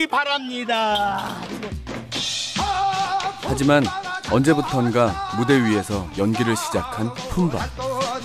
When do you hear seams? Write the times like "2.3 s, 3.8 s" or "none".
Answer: 1.2 s